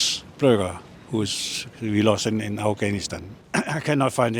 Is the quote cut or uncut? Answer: cut